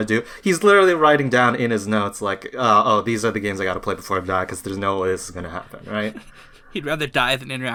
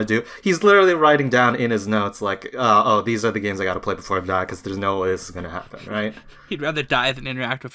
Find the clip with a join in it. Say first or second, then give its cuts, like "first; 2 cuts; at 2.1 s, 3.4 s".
second; 1 cut; at 6.3 s